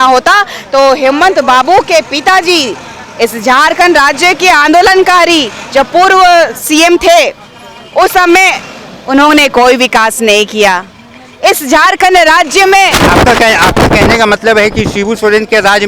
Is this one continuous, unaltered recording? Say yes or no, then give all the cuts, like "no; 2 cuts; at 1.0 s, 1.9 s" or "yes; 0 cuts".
yes; 0 cuts